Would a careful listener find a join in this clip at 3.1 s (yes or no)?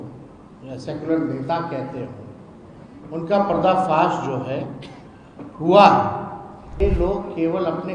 no